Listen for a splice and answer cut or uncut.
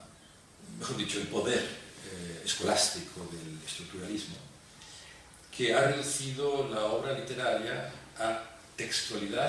cut